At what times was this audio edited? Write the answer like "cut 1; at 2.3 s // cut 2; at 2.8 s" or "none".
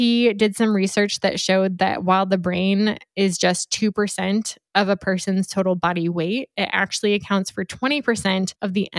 none